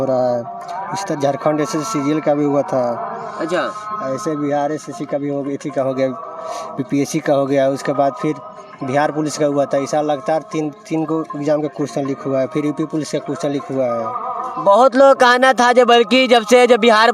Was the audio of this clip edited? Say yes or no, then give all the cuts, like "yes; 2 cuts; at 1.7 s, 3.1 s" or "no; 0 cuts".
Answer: no; 0 cuts